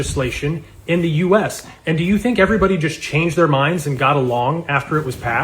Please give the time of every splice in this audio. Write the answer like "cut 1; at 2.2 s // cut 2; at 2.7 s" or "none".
cut 1; at 1.2 s